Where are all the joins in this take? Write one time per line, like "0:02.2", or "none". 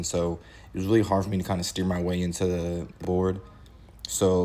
0:03.0